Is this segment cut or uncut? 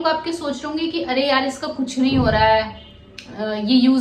uncut